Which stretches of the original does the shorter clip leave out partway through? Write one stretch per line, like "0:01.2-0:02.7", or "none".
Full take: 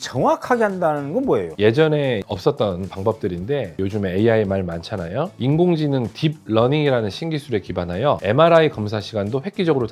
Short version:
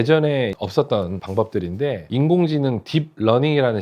0:03.7-0:05.3

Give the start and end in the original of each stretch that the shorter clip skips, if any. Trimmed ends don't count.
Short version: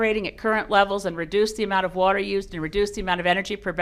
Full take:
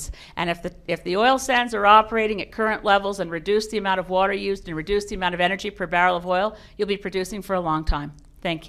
none

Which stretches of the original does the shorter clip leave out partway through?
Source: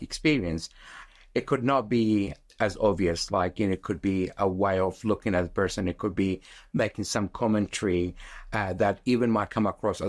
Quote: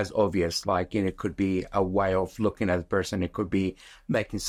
none

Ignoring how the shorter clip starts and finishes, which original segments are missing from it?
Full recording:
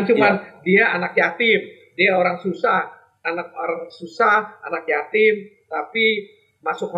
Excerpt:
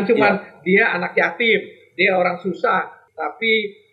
0:03.0-0:05.6

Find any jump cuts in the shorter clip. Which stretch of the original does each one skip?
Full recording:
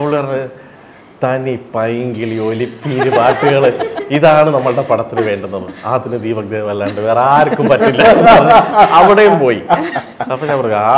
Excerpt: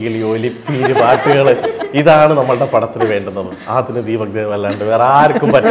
none

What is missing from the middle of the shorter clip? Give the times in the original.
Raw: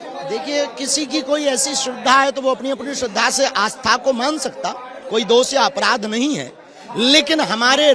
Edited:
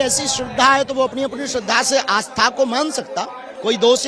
none

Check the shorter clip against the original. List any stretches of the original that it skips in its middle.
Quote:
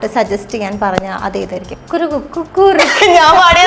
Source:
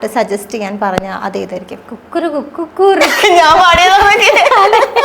0:01.7-0:02.0

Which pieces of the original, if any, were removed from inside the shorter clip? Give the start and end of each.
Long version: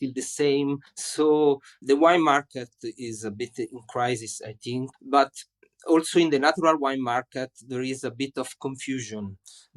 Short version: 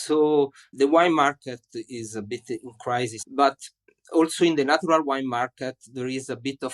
0:04.3-0:05.0

